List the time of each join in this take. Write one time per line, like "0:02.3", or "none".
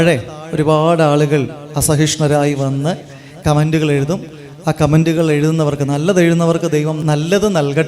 0:05.0
0:07.0